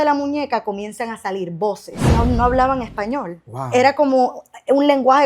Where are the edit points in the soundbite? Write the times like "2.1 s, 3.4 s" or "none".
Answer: 2.1 s